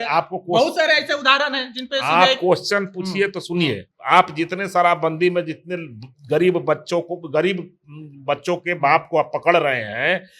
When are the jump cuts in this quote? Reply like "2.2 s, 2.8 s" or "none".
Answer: 3.9 s